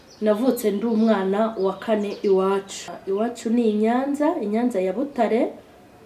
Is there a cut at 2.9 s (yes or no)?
yes